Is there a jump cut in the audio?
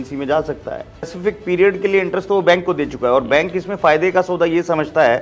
yes; 1 cut; at 1.1 s

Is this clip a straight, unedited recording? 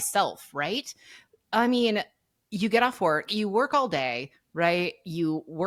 yes; 0 cuts

